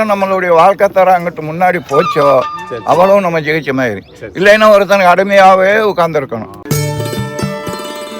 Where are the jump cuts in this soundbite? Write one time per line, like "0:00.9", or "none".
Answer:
0:06.5